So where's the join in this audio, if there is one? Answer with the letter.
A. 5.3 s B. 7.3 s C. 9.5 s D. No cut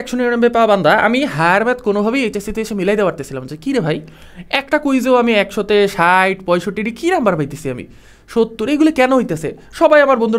D